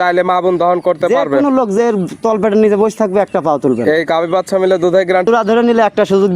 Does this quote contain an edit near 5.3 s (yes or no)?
yes